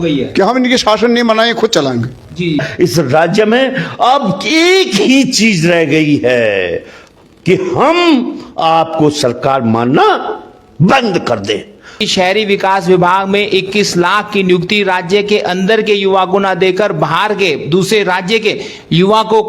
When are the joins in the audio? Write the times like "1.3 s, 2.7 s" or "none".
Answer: 2.6 s, 12.0 s